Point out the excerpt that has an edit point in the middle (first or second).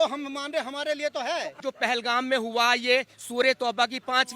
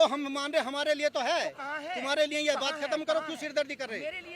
first